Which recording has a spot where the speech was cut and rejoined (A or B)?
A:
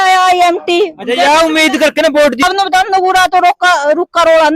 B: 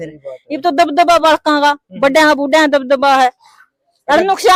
A